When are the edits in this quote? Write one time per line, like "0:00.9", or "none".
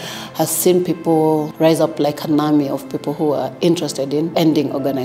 0:01.5
0:04.3